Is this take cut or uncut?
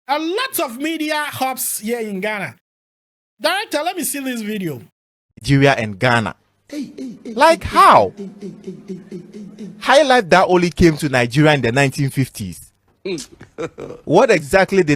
uncut